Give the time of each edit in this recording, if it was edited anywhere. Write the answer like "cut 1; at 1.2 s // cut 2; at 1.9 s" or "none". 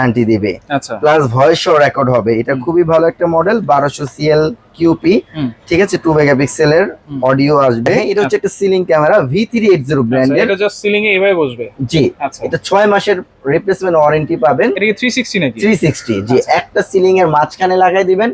cut 1; at 8.0 s